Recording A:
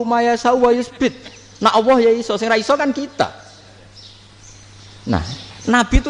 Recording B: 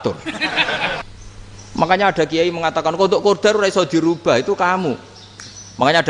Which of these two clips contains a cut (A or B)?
B